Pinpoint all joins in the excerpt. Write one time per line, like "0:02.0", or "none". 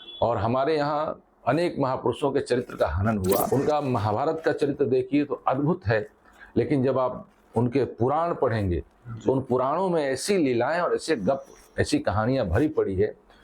0:03.5